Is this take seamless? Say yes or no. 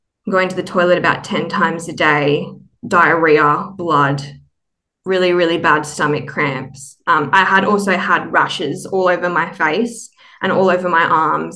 yes